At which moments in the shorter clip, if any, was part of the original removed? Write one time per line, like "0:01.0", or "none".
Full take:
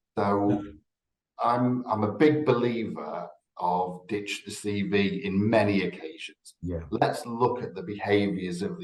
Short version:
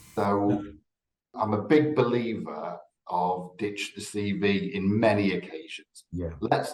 0:01.3